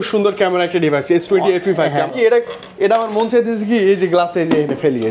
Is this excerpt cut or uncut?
cut